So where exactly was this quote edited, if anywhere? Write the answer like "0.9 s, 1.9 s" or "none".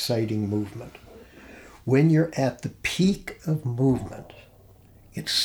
none